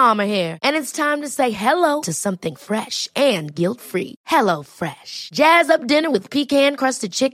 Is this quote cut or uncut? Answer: uncut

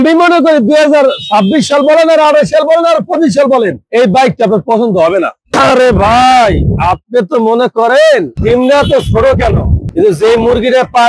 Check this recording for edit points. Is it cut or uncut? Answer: cut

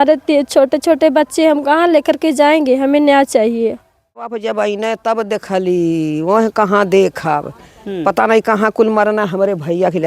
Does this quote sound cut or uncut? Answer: cut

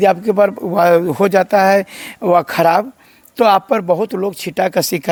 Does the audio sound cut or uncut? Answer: uncut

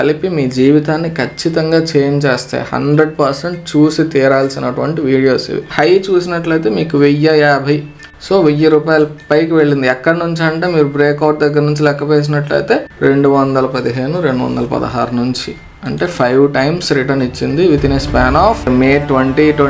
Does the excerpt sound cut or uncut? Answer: cut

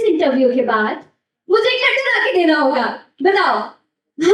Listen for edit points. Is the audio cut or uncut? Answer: uncut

